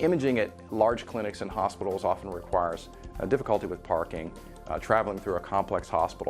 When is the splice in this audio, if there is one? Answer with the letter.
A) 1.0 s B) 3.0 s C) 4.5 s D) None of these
C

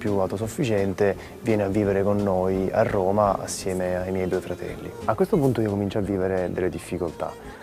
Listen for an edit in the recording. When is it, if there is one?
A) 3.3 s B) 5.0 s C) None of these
B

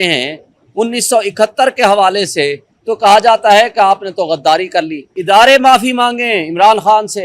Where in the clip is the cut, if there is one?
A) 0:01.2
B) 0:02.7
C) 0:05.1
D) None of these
C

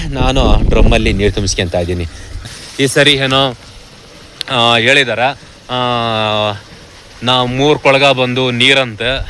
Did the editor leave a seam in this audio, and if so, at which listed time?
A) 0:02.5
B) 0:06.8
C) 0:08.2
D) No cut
A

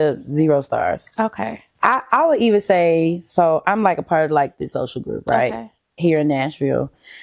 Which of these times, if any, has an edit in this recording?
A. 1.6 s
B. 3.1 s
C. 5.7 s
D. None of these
A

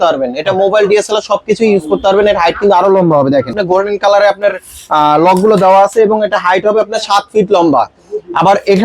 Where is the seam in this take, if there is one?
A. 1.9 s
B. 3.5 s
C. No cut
B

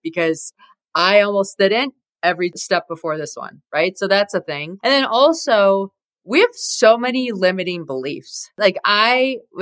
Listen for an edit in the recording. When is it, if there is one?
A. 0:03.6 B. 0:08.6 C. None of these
B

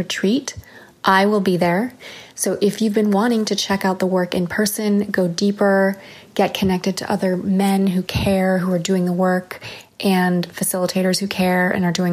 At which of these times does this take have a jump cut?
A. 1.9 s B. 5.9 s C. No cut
C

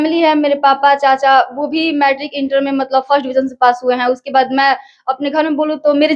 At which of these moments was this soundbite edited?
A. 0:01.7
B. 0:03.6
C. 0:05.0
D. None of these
D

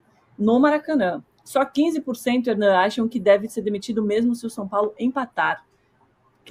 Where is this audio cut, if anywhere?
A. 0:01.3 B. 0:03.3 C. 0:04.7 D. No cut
D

